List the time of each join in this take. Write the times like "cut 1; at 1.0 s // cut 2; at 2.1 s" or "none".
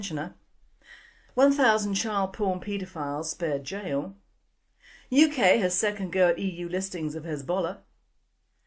cut 1; at 5.4 s